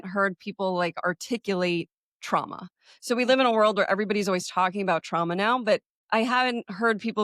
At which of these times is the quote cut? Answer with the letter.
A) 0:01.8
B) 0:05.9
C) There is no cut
B